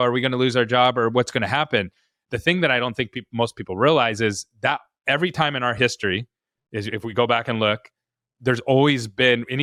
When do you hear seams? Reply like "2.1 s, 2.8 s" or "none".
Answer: none